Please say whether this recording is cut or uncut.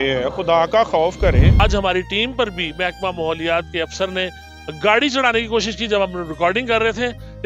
cut